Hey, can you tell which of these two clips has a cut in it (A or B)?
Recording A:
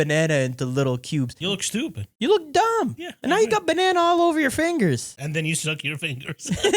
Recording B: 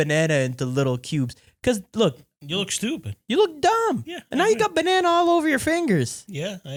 A